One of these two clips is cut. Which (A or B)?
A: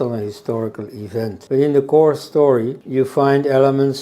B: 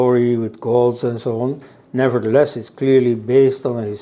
A